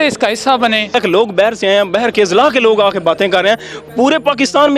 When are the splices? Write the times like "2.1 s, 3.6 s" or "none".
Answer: 0.9 s